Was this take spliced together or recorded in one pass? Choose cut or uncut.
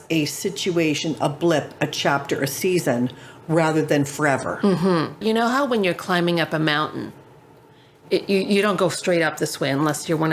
cut